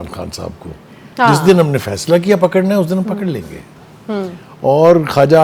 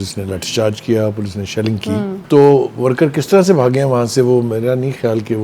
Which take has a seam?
second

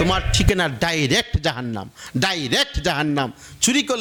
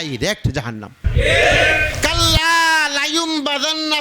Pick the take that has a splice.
second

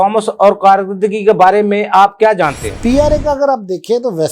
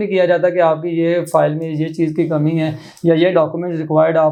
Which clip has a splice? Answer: first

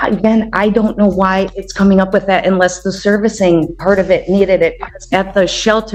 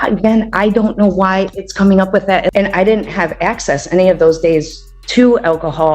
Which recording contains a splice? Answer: second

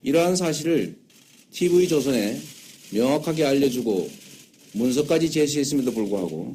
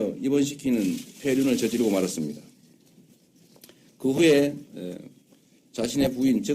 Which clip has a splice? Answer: second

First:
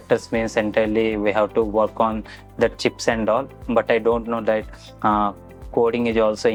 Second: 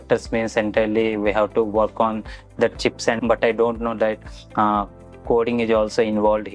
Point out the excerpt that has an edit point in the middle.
second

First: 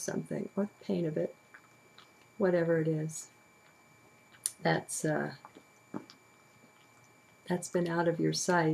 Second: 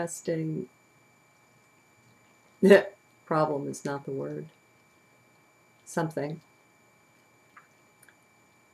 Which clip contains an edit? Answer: first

